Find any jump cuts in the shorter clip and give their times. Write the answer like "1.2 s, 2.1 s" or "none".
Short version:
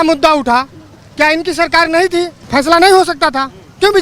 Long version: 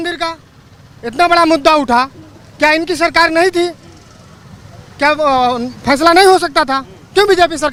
2.4 s

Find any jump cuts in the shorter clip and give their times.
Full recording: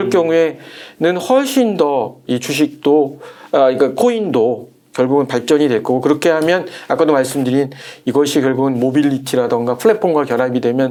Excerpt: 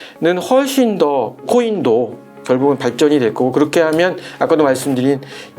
1.4 s

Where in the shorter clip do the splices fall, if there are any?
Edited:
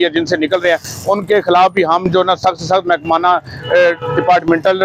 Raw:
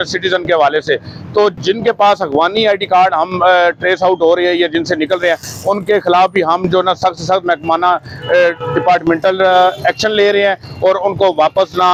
none

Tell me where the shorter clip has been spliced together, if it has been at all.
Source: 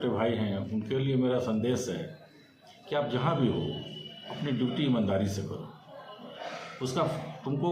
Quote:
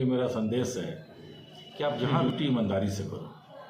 2.1 s

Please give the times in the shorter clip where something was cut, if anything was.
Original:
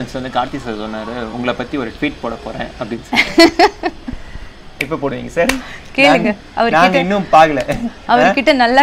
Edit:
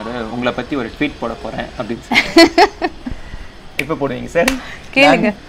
none

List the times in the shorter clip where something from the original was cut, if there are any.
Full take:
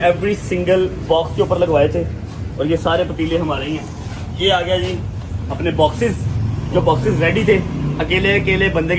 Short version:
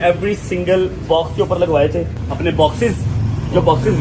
2.2 s

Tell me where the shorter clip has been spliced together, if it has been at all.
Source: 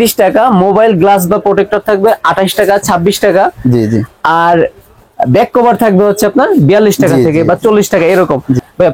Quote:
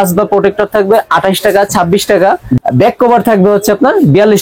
2.6 s

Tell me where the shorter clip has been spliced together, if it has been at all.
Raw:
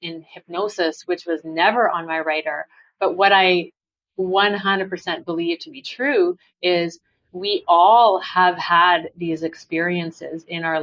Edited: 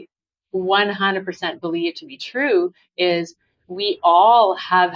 none

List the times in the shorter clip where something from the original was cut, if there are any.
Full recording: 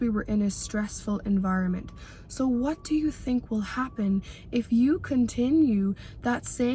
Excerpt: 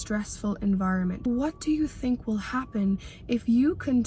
1.3 s

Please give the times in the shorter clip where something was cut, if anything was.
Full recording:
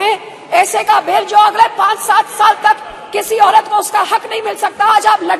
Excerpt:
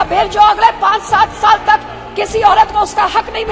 none

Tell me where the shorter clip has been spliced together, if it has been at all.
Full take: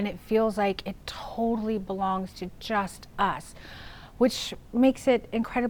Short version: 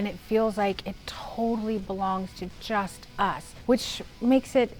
3.5 s

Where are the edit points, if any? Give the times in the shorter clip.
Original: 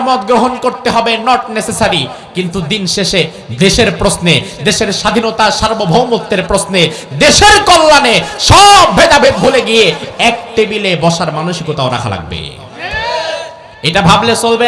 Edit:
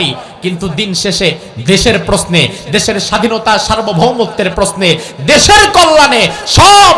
none

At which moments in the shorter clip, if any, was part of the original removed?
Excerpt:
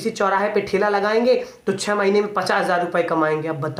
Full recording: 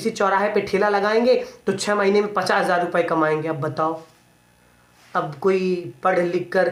none

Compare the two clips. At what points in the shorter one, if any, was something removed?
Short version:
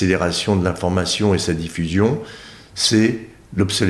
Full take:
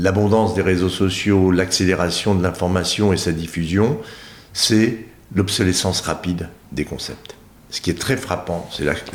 none

